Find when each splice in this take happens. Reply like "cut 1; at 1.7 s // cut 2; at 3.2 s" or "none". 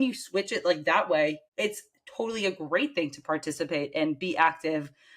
cut 1; at 1.5 s